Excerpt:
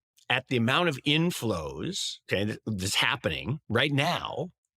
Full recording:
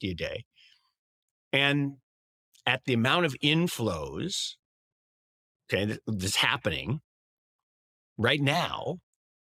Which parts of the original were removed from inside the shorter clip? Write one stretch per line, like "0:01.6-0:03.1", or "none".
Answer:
0:04.5-0:05.5
0:07.0-0:08.1